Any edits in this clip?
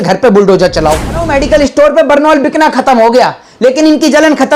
yes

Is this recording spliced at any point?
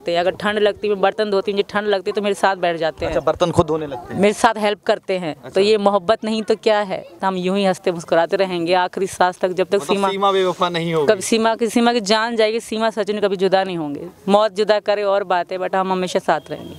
no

